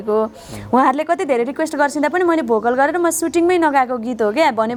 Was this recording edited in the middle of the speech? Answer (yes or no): no